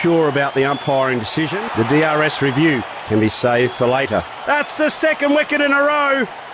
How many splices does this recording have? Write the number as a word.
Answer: one